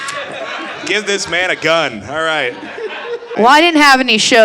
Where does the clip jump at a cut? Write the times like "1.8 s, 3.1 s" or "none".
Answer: 3.3 s